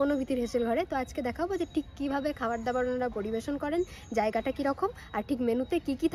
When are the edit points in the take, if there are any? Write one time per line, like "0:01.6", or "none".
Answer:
none